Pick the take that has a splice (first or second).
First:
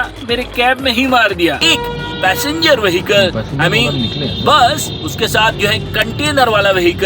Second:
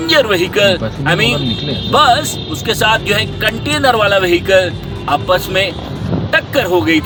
first